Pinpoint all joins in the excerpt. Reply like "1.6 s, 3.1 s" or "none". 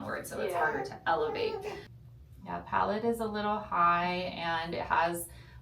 1.8 s